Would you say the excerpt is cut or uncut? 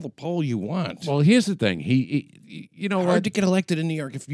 cut